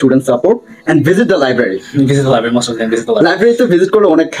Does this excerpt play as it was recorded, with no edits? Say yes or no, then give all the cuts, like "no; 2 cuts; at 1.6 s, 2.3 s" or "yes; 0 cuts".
yes; 0 cuts